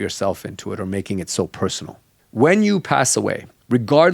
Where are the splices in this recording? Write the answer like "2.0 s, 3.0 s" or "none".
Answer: 2.0 s